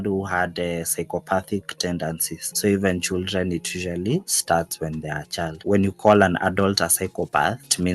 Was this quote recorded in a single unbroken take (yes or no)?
yes